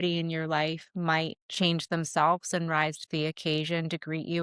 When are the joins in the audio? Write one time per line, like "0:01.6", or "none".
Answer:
0:01.4